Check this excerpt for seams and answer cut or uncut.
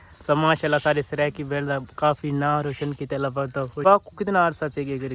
cut